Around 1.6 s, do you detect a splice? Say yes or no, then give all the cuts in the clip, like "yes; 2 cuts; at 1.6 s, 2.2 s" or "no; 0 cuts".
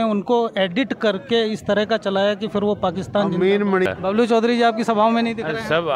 no; 1 cut; at 3.9 s